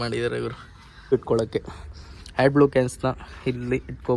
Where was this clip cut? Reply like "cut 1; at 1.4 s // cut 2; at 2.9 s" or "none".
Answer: cut 1; at 1.1 s